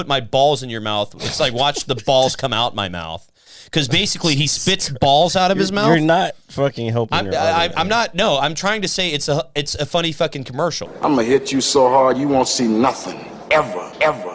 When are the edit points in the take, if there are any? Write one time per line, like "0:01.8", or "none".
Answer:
0:10.9